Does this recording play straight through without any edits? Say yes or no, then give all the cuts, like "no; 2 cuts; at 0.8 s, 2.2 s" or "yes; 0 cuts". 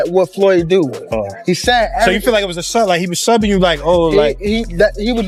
yes; 0 cuts